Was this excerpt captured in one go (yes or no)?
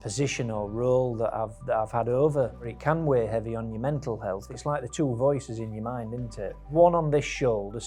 no